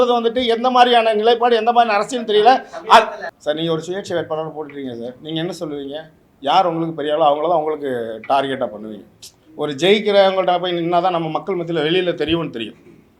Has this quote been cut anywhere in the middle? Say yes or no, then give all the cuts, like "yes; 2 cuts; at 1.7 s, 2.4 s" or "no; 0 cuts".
yes; 1 cut; at 3.3 s